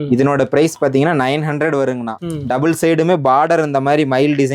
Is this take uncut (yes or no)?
no